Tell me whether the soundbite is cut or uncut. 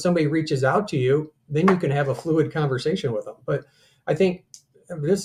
uncut